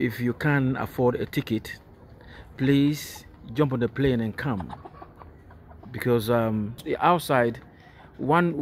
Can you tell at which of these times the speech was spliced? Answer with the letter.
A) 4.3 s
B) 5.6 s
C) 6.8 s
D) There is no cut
C